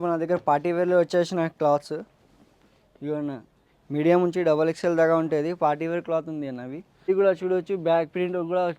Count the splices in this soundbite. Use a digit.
1